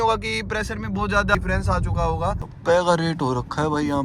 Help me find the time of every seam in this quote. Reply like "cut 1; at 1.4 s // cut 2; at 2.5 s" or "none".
cut 1; at 1.3 s // cut 2; at 2.5 s